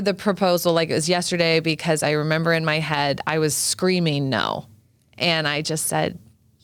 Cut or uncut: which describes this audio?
uncut